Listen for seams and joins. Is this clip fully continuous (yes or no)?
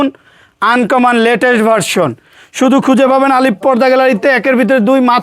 yes